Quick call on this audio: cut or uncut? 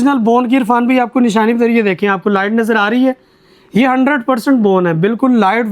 uncut